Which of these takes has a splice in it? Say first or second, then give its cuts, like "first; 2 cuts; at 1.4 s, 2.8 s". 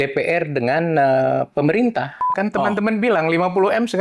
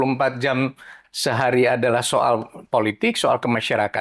first; 1 cut; at 2.3 s